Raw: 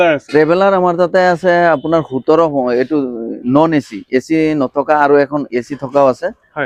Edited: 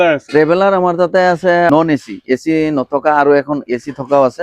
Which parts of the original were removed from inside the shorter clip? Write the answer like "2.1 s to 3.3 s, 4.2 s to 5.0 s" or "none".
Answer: 1.7 s to 3.5 s